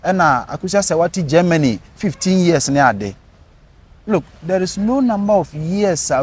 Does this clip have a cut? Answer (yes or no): no